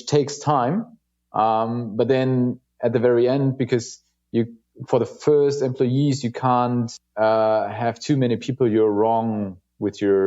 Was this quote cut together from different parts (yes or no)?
yes